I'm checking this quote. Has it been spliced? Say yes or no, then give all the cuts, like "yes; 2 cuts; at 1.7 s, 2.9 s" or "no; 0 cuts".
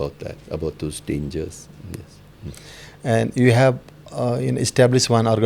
no; 0 cuts